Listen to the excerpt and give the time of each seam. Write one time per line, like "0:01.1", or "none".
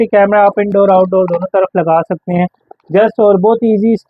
none